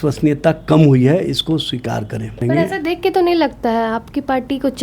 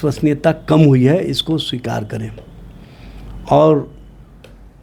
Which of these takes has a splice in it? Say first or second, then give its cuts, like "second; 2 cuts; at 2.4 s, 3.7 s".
first; 1 cut; at 2.4 s